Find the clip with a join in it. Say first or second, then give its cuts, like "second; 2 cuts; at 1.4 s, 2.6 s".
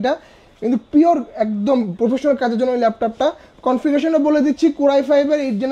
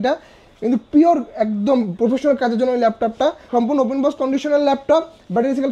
second; 1 cut; at 3.4 s